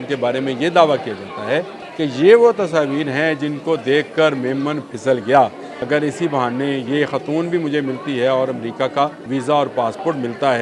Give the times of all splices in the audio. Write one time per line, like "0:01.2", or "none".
0:01.8
0:05.7
0:09.2